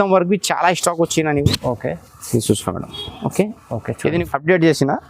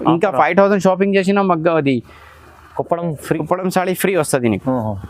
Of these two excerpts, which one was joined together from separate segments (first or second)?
first